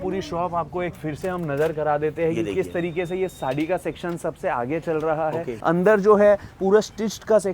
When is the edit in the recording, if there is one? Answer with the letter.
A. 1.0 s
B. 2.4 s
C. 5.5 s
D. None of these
C